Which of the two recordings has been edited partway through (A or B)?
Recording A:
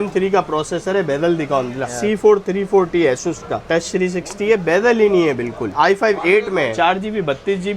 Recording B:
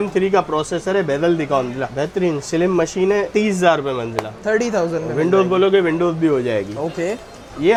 A